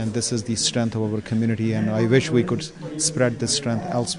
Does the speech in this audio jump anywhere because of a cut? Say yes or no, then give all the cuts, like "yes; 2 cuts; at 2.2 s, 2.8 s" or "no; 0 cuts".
no; 0 cuts